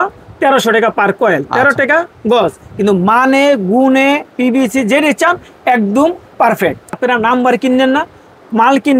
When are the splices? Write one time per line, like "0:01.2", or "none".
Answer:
0:07.0